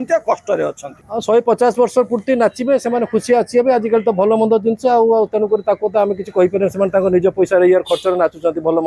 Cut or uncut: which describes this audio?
cut